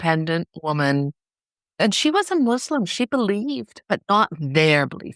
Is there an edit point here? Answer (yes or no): yes